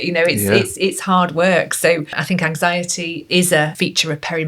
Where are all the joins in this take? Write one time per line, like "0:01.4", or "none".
0:02.2
0:03.7